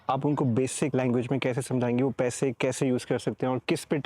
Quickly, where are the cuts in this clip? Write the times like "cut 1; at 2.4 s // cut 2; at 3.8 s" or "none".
cut 1; at 0.9 s